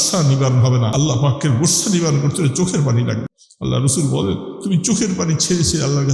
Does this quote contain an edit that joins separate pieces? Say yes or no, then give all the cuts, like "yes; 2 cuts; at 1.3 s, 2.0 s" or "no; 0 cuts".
yes; 2 cuts; at 0.9 s, 3.4 s